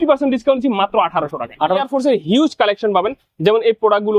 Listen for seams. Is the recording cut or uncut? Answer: cut